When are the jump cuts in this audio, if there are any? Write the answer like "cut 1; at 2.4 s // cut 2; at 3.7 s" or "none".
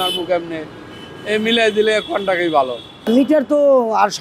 cut 1; at 2.9 s